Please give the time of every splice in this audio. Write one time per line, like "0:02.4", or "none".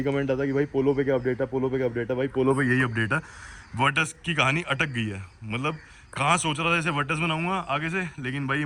none